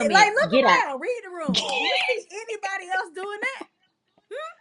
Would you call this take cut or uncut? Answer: uncut